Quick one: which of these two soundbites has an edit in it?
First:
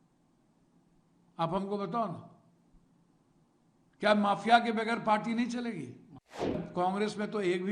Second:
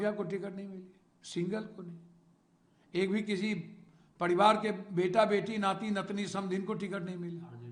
first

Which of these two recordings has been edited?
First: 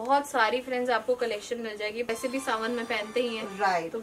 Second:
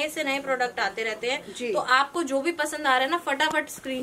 first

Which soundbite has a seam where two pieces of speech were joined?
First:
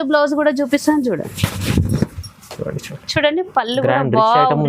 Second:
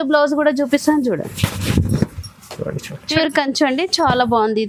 second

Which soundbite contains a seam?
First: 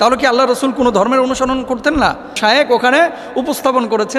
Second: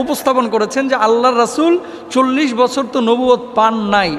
first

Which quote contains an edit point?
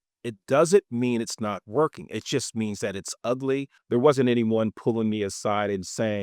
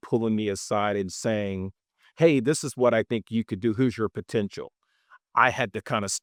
first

